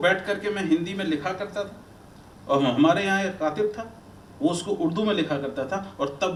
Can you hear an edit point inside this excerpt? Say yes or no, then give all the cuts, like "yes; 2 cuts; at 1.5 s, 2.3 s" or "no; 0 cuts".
no; 0 cuts